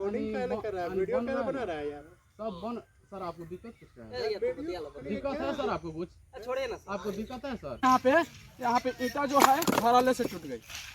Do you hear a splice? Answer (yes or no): yes